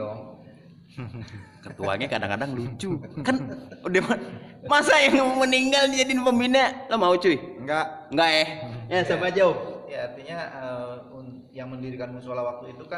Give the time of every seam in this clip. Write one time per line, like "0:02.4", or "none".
none